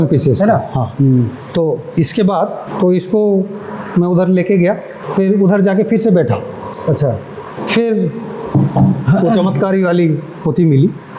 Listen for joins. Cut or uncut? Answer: uncut